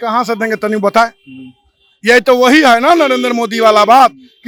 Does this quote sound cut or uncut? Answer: uncut